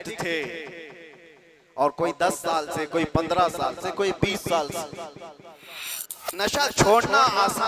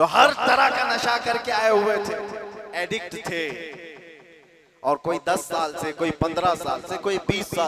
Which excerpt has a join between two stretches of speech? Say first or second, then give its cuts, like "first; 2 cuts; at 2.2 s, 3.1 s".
first; 1 cut; at 5.6 s